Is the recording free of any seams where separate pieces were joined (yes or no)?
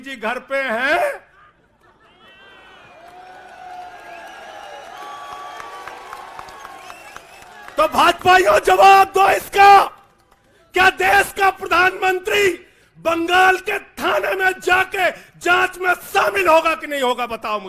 yes